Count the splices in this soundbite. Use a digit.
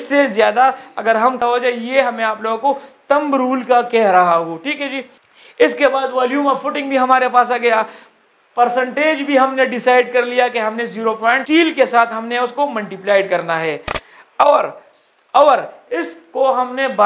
2